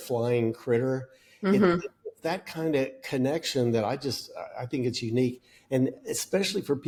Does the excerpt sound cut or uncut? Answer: uncut